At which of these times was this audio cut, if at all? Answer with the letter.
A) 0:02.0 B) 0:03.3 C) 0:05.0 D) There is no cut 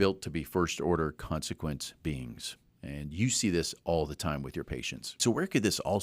C